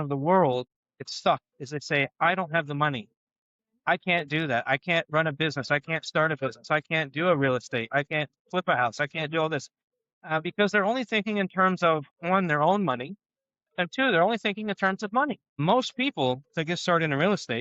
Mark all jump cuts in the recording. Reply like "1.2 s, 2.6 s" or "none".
1.1 s, 15.5 s